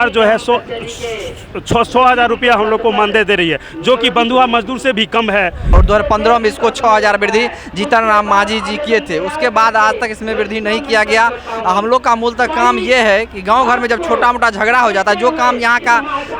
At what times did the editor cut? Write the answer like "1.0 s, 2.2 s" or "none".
5.8 s